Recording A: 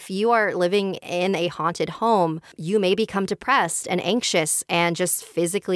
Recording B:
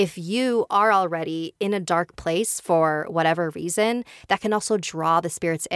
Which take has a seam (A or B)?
A